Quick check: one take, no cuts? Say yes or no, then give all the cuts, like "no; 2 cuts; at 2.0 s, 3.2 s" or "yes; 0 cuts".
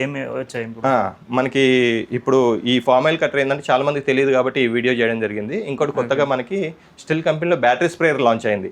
yes; 0 cuts